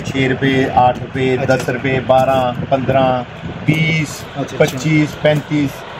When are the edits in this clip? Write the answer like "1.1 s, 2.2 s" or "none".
none

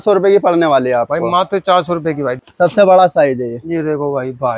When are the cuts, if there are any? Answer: 2.4 s

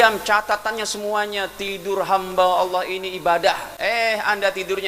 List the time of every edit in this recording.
3.7 s

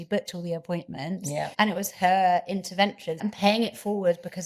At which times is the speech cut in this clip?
1.5 s, 3.2 s

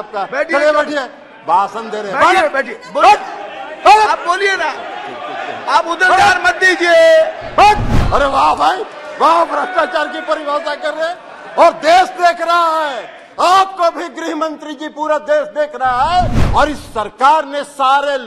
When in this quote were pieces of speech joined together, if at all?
8.0 s, 16.4 s

